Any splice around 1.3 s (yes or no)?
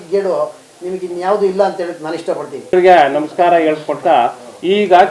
no